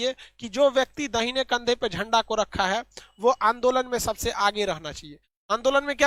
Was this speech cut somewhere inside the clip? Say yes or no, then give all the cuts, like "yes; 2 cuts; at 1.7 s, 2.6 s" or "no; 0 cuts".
no; 0 cuts